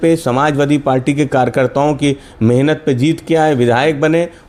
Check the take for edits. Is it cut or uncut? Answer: uncut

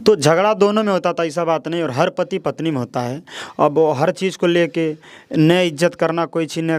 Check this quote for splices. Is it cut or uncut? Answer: uncut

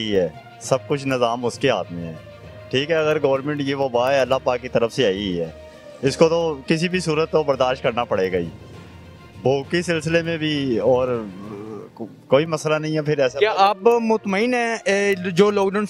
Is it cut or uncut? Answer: uncut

